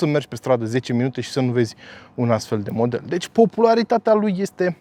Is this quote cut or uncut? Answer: uncut